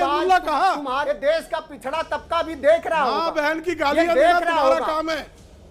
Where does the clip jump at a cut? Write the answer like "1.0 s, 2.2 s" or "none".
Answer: 1.0 s

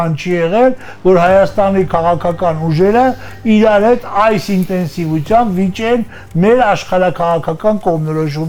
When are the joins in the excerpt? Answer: none

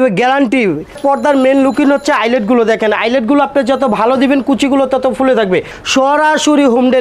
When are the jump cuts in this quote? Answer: 1.0 s, 5.8 s

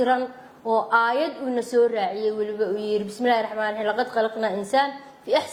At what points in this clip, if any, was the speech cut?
none

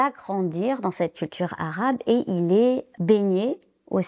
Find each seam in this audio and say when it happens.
2.9 s

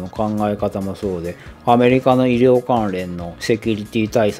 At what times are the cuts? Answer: none

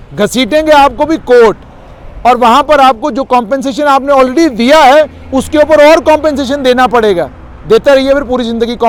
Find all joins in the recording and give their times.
none

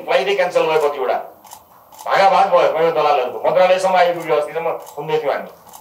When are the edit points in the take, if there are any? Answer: none

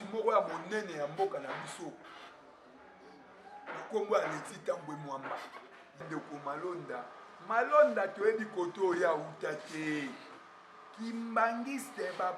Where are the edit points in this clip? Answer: 6.1 s

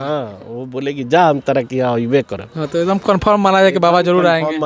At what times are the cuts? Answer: none

